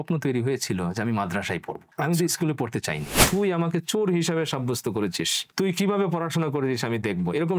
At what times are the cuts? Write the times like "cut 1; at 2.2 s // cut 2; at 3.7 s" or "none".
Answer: cut 1; at 1.8 s // cut 2; at 3.2 s